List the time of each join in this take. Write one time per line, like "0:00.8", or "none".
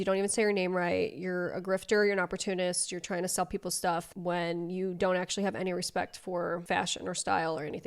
0:06.6